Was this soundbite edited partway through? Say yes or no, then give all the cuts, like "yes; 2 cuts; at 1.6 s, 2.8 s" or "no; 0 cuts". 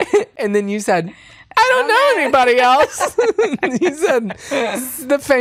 no; 0 cuts